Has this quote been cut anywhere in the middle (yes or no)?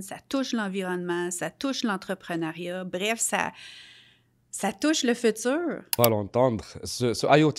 yes